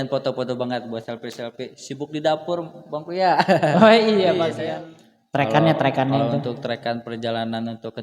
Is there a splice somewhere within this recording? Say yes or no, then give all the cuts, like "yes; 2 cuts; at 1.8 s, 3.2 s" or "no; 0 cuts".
yes; 1 cut; at 4.6 s